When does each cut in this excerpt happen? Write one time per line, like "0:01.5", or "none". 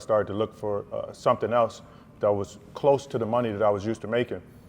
none

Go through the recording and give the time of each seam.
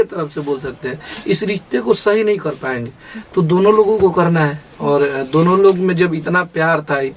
none

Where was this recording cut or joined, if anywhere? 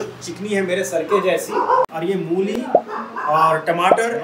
0:01.9

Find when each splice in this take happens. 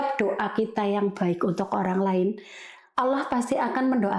none

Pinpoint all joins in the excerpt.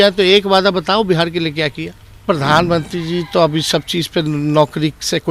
0:02.2

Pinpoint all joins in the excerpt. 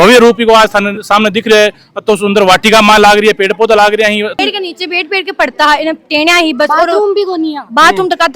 0:04.4

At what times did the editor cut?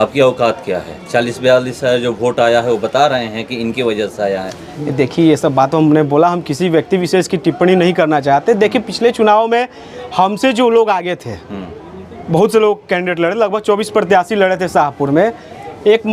none

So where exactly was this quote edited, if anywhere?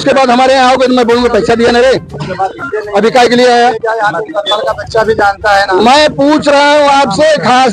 none

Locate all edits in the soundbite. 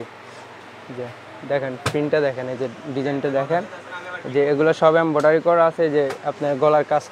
none

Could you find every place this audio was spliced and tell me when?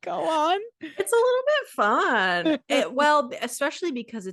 none

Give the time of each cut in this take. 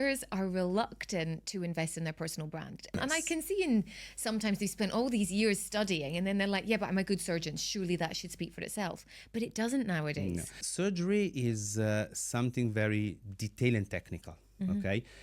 0:03.0
0:10.6

